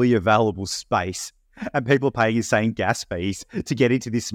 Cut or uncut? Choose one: uncut